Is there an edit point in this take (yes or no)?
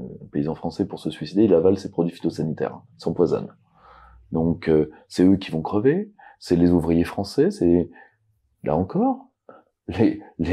no